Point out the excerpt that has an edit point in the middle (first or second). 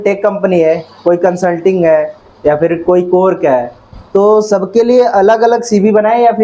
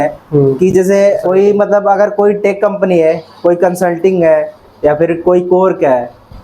second